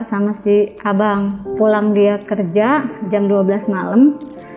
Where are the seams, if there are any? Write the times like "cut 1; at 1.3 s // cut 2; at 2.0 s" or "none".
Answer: cut 1; at 1.4 s